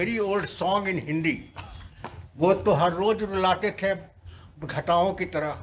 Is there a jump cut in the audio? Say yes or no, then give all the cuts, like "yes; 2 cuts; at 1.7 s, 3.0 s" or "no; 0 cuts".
no; 0 cuts